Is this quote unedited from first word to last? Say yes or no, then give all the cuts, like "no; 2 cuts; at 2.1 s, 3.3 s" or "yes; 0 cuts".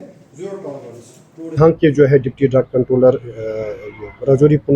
yes; 0 cuts